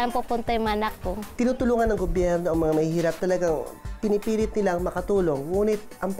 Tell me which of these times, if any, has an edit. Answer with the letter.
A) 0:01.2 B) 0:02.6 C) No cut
A